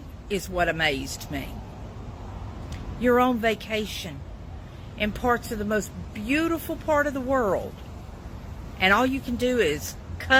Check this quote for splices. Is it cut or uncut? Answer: uncut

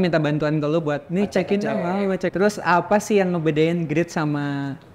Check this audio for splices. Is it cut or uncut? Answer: cut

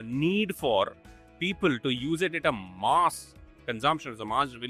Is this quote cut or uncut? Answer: uncut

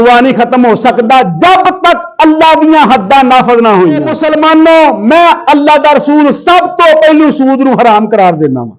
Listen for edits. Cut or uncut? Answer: cut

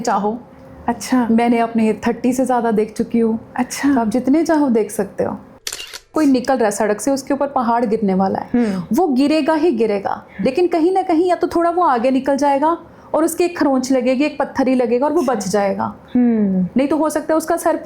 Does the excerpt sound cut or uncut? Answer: cut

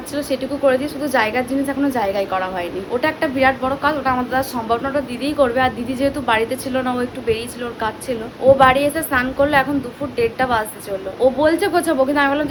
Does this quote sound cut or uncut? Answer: uncut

